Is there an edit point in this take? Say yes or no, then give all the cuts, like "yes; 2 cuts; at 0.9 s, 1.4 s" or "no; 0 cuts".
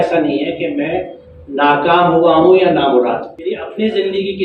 yes; 1 cut; at 3.3 s